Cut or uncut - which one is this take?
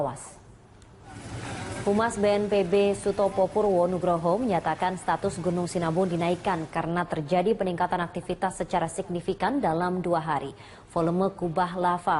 cut